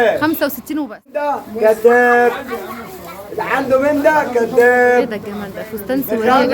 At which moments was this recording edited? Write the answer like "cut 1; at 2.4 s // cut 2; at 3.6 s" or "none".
cut 1; at 1.4 s

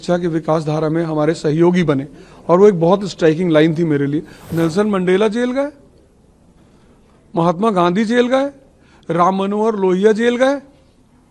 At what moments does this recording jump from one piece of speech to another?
cut 1; at 4.4 s

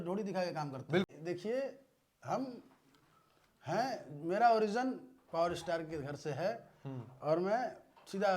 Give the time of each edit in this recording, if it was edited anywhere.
cut 1; at 1.1 s

